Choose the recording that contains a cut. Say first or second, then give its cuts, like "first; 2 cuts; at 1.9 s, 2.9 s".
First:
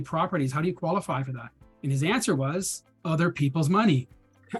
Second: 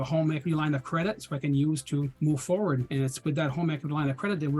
second; 2 cuts; at 2.1 s, 2.9 s